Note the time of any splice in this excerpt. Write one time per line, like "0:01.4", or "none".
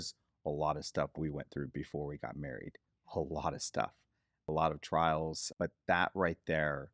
0:05.4